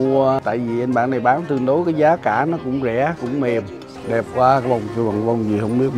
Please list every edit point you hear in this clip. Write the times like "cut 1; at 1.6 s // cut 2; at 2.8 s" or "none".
cut 1; at 3.9 s